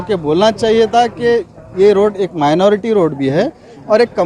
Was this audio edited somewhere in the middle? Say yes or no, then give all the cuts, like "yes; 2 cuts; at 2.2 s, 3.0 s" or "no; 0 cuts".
no; 0 cuts